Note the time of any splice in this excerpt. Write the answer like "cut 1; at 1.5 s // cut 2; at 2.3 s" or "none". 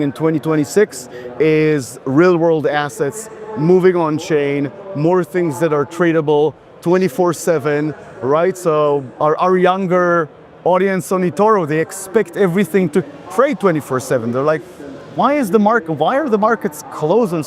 none